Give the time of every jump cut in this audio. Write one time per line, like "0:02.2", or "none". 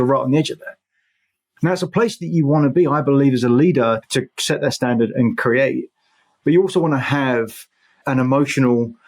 0:04.1
0:08.0